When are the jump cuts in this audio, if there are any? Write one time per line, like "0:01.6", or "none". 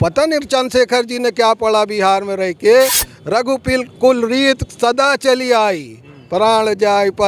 none

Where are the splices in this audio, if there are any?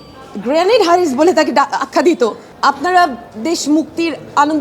0:02.5

